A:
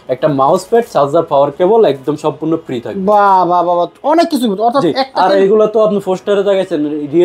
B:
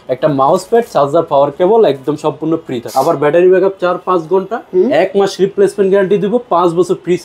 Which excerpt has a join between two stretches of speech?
B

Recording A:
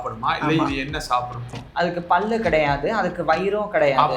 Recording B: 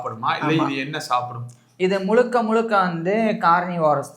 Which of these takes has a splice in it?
A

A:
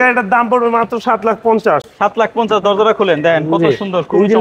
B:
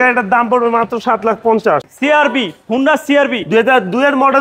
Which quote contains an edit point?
B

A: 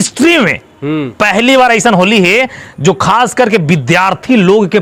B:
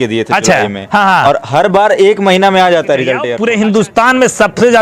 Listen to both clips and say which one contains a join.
B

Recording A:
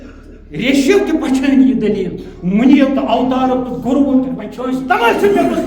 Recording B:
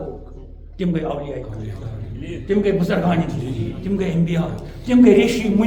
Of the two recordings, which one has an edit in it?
A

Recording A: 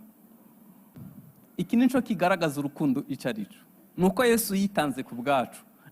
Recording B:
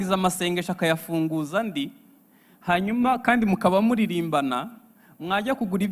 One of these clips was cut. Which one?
A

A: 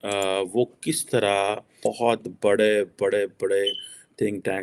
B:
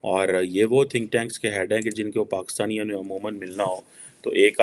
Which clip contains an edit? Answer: A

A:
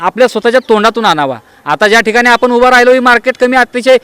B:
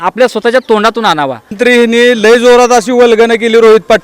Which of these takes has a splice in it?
B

